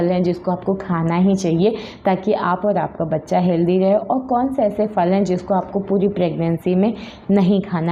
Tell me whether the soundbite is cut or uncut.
uncut